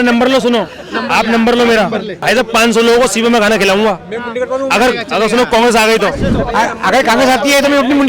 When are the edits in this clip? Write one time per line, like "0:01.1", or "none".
0:02.2
0:06.3